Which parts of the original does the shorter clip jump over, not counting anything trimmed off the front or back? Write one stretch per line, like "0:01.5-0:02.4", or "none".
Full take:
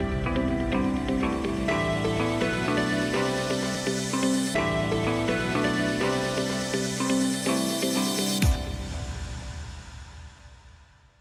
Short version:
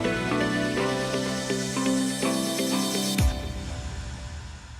0:03.6-0:06.5